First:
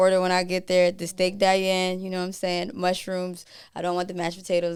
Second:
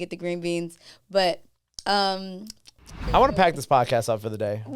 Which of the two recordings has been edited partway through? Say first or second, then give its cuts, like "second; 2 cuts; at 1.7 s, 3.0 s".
second; 1 cut; at 3.1 s